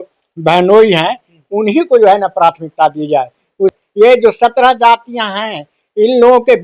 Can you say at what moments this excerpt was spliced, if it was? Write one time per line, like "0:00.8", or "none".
0:03.8

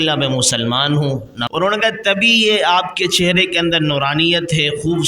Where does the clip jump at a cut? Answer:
0:01.3

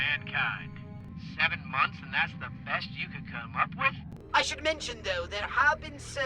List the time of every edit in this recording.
0:01.0
0:03.9

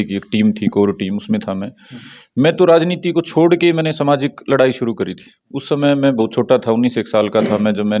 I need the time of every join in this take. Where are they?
none

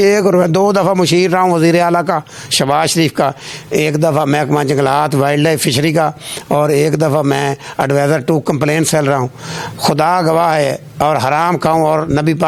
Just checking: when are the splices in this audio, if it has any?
none

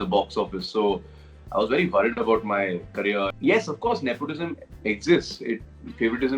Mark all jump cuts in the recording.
0:03.3

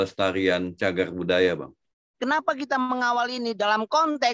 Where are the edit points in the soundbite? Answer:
0:02.1

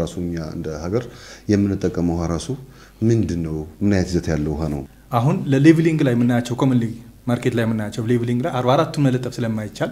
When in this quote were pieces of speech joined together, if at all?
0:04.9

